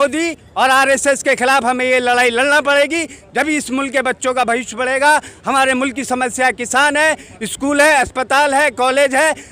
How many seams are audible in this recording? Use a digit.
0